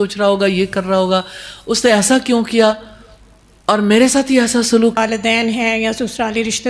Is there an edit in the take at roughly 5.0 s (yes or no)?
yes